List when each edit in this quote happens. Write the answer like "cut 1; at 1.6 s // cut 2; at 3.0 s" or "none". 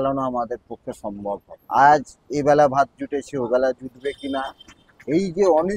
cut 1; at 1.5 s